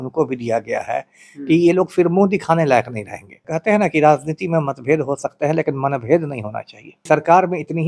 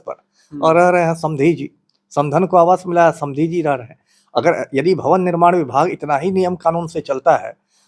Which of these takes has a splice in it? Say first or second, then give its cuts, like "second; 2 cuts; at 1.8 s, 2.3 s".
first; 2 cuts; at 3.4 s, 7.0 s